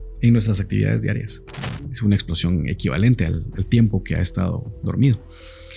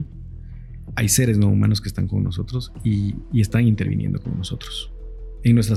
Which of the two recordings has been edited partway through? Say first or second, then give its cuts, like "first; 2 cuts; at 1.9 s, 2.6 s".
first; 1 cut; at 1.9 s